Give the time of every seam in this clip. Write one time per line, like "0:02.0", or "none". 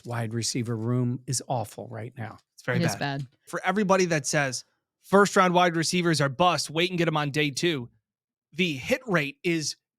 0:03.5